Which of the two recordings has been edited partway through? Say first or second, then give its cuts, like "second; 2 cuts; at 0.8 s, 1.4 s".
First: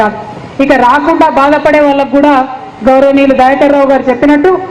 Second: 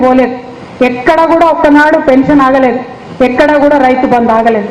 second; 1 cut; at 1.8 s